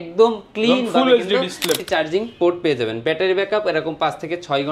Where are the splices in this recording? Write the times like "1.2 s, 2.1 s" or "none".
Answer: 1.8 s